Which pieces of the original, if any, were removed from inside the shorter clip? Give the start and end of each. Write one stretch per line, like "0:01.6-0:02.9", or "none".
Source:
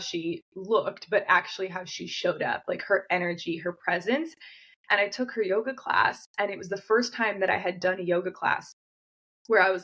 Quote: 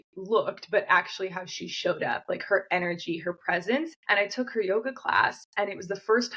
0:04.4-0:04.8